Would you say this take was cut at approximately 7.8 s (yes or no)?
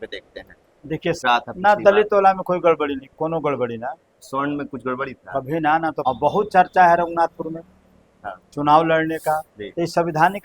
no